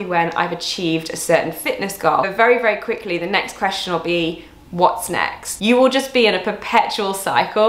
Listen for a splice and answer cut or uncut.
cut